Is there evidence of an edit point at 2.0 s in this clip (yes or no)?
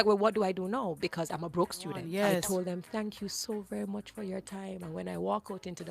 yes